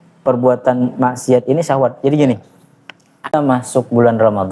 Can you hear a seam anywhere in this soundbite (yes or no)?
yes